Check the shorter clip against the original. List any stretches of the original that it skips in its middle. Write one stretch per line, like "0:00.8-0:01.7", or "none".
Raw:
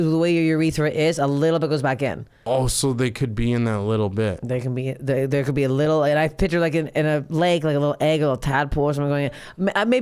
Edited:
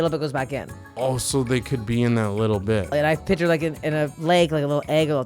0:04.4-0:06.0